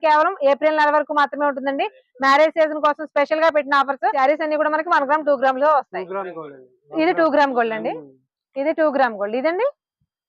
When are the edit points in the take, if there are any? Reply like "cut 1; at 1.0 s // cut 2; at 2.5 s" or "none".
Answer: cut 1; at 4.1 s